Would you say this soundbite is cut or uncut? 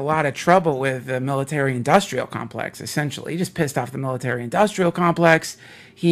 cut